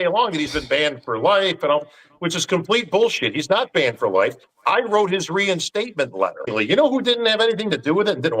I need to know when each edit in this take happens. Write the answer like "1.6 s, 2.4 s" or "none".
6.5 s